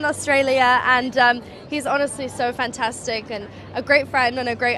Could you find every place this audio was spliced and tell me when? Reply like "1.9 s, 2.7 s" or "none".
none